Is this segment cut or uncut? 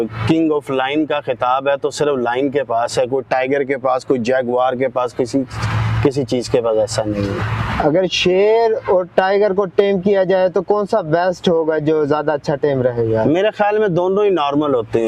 uncut